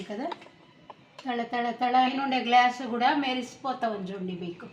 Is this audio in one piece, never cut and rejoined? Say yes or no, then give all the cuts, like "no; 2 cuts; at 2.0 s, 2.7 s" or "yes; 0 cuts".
no; 1 cut; at 2.1 s